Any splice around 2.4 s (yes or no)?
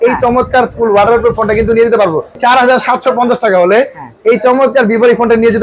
yes